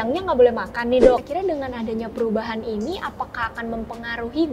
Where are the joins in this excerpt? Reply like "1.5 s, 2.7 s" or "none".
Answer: 1.2 s